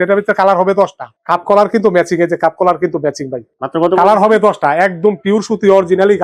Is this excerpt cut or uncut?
uncut